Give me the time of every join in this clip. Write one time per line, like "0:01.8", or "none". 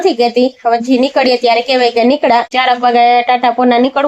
0:02.5